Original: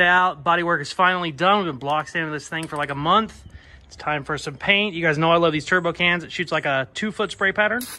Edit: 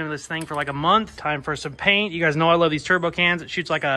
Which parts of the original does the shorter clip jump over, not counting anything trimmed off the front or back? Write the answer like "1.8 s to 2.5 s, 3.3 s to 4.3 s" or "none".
3.4 s to 4.0 s